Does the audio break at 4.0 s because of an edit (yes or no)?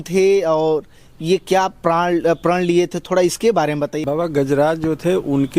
yes